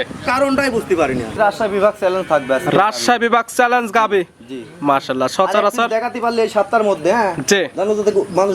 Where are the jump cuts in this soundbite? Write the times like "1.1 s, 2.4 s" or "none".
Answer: 1.3 s

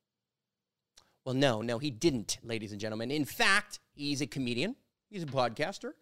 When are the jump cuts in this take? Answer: none

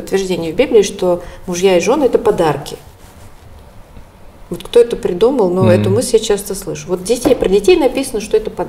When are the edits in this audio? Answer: none

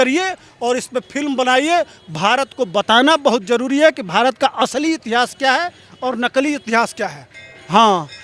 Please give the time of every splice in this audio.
7.3 s

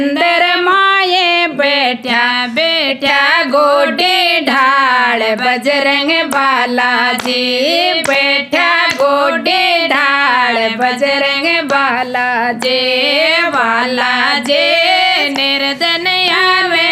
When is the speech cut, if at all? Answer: none

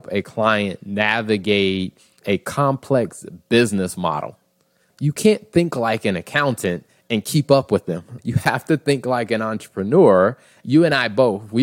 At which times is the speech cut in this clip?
2.2 s, 4.8 s, 8.1 s, 10.6 s

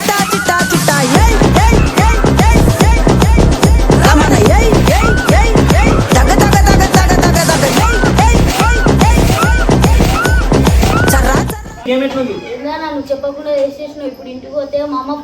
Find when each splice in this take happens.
11.8 s

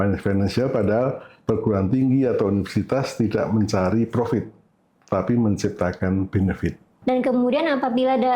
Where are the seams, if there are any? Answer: 6.9 s

